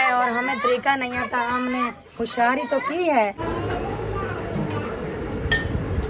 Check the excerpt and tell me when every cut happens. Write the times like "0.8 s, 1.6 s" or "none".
3.4 s